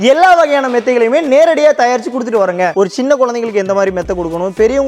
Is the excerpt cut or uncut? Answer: cut